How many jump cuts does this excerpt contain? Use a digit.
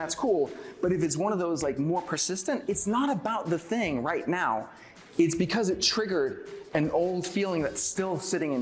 0